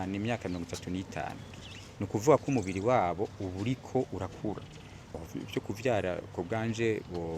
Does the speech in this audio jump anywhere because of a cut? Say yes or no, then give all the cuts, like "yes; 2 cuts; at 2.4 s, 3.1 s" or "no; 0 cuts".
yes; 1 cut; at 5.0 s